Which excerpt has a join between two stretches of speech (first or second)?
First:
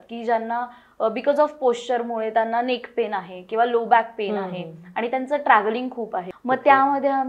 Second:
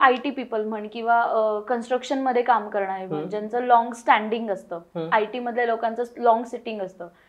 first